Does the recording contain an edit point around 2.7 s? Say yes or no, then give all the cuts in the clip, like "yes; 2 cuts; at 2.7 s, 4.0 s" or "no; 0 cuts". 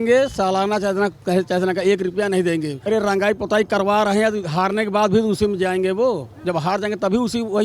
yes; 1 cut; at 2.7 s